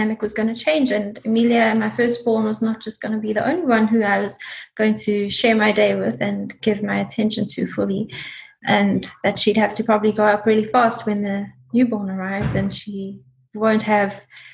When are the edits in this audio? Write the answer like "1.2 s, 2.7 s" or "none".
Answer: none